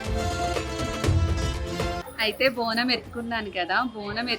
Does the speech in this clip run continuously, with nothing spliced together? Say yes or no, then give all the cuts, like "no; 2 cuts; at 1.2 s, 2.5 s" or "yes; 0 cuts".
no; 1 cut; at 2.1 s